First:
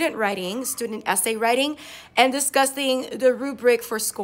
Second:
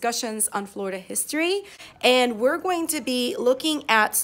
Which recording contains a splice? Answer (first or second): second